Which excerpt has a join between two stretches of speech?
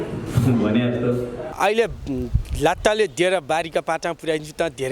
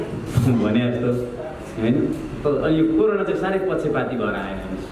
first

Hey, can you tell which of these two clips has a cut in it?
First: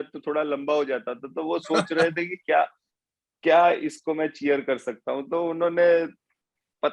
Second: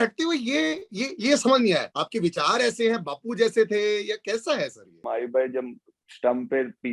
second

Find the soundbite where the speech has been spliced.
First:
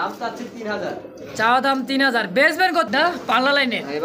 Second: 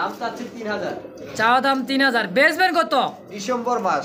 first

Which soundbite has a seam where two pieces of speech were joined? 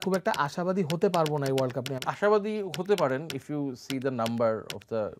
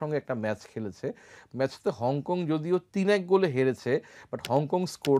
first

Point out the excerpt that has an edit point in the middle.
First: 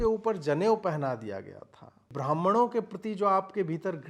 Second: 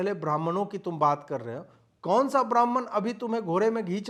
first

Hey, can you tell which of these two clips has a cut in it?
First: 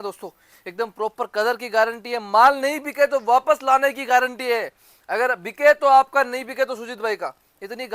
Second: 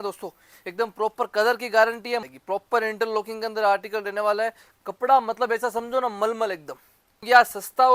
second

